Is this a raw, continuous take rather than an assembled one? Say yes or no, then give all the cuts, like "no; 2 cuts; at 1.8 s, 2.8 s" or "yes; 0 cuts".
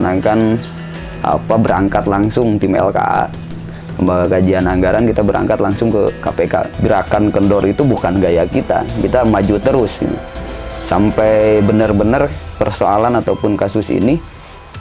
no; 1 cut; at 6.7 s